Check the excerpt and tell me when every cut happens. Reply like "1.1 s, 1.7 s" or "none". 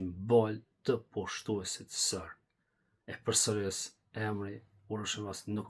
none